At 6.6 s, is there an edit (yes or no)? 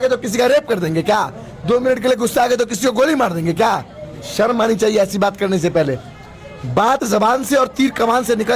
no